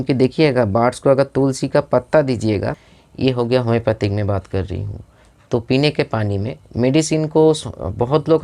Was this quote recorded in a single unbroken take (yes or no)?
no